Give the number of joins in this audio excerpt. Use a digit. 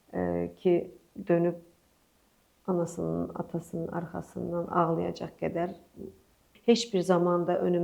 1